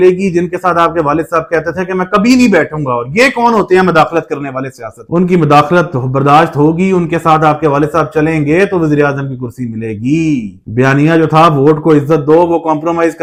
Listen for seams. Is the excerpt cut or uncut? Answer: uncut